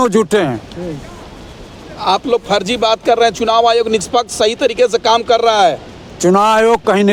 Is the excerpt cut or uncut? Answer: uncut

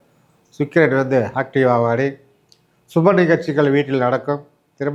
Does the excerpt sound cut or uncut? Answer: uncut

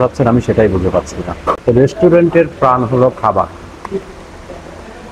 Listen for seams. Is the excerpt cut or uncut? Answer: cut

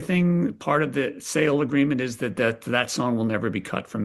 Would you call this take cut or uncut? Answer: uncut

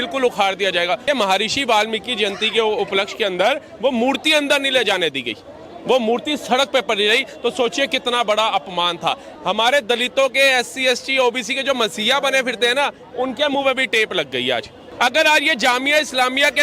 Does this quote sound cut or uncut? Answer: cut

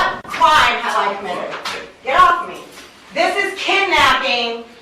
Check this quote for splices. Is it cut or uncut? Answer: uncut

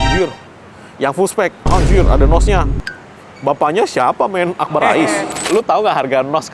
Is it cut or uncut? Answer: cut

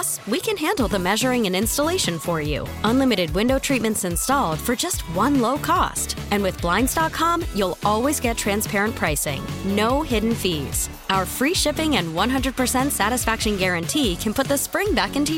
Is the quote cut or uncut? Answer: uncut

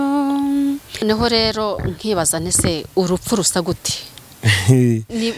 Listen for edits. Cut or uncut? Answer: cut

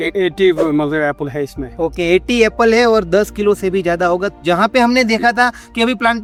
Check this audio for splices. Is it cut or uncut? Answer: uncut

